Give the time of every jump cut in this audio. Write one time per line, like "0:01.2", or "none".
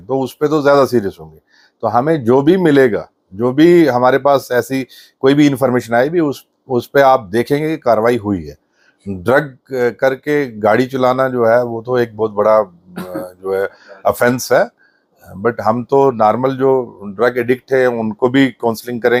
none